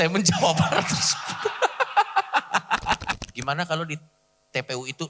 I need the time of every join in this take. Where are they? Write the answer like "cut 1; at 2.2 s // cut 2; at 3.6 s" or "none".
cut 1; at 3.2 s